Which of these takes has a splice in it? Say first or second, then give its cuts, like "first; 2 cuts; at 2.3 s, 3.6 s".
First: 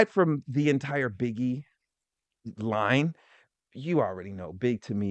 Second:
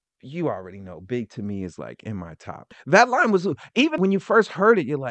second; 2 cuts; at 2.7 s, 3.9 s